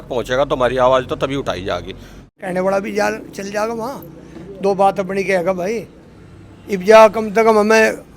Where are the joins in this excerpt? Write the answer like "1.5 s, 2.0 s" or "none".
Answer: 2.2 s